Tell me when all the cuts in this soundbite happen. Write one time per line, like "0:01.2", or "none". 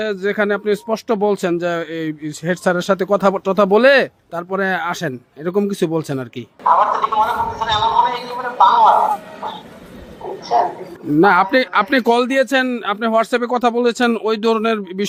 none